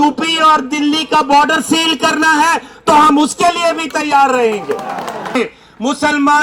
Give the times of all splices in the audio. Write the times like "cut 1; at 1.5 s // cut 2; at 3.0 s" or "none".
cut 1; at 5.3 s